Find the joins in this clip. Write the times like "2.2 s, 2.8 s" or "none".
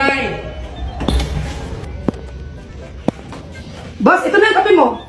none